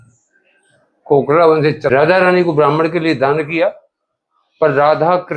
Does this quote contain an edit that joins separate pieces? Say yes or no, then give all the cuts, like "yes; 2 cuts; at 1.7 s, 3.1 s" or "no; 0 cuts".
yes; 1 cut; at 1.9 s